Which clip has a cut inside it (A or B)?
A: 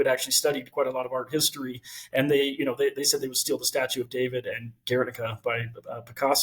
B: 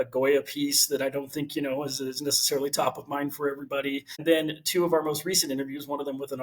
B